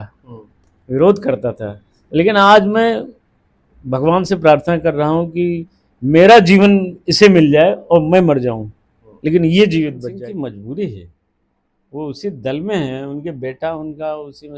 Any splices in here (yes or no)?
yes